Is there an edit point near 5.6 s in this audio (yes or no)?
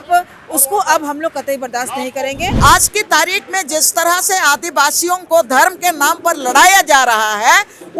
no